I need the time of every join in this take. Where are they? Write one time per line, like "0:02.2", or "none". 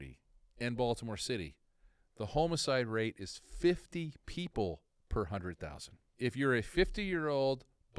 0:06.1